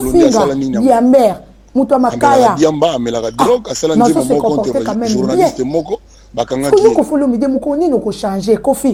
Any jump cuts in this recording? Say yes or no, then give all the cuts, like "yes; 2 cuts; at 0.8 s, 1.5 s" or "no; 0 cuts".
no; 0 cuts